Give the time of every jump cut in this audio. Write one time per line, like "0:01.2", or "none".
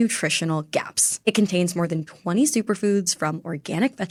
none